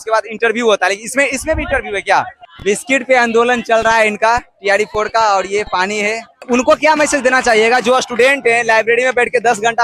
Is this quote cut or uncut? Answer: cut